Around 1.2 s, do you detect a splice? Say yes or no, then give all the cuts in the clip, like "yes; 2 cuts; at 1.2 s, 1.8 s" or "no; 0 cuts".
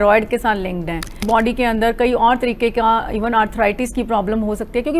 yes; 1 cut; at 1.2 s